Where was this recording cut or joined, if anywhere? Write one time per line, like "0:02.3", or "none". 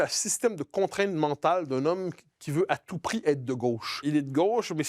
0:04.0

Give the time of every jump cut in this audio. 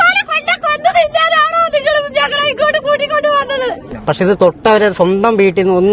0:03.9

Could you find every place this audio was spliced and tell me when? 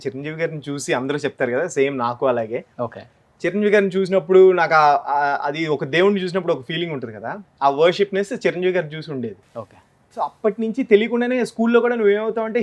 none

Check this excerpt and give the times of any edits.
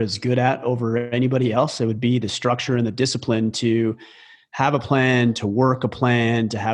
none

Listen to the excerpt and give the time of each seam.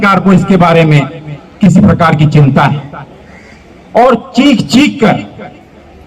none

